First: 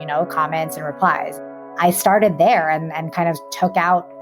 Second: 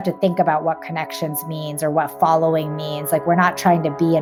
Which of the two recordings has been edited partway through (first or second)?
first